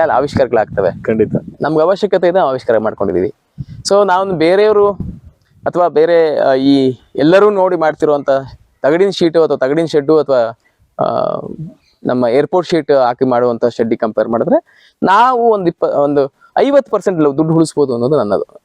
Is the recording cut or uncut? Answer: uncut